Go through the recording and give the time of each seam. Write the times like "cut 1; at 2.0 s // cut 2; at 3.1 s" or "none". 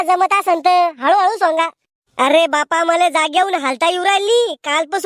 none